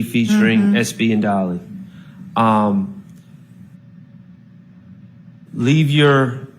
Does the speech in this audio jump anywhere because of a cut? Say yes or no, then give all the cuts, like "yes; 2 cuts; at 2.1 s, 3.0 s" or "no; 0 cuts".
no; 0 cuts